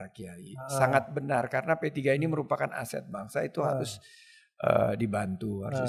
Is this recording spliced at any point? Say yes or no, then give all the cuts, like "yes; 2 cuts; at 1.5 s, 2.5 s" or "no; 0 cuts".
no; 0 cuts